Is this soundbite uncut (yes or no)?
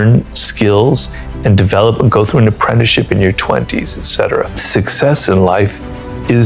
no